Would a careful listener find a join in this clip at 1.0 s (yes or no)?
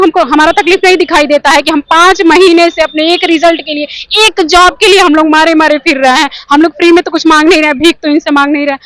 no